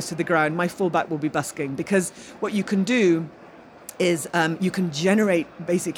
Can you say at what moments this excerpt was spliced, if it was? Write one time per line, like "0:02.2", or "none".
none